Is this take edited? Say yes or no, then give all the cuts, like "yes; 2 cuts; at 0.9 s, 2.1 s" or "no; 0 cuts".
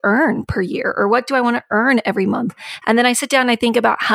no; 0 cuts